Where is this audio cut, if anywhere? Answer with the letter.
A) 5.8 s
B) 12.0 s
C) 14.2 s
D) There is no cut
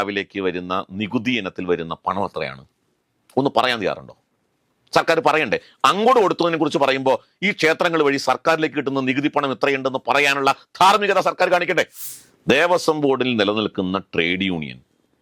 B